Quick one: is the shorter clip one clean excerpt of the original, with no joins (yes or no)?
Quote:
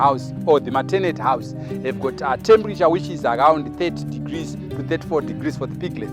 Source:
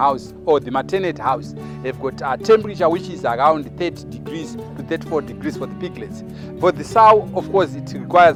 yes